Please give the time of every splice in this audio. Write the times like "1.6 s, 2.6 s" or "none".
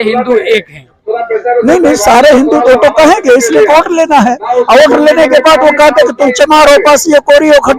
none

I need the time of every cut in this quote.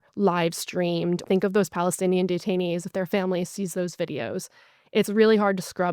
1.2 s

